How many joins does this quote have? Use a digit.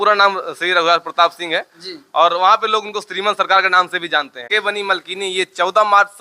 1